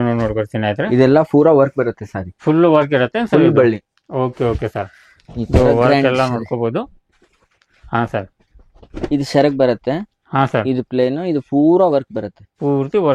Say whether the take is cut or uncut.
uncut